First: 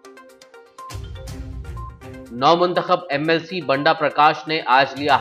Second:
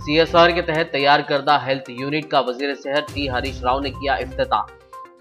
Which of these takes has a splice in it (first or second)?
first